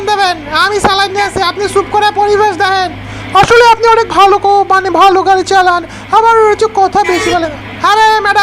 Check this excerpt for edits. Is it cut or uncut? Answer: uncut